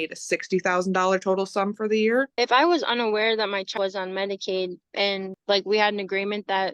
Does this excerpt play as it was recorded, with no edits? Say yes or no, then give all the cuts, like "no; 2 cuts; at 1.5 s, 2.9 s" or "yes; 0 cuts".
no; 2 cuts; at 2.3 s, 5.3 s